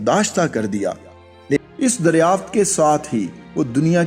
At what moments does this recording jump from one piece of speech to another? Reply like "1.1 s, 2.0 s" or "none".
1.6 s